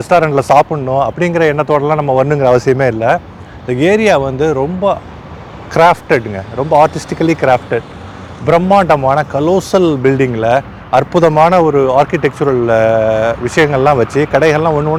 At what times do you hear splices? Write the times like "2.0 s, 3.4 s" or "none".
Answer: none